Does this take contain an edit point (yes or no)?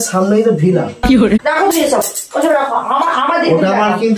yes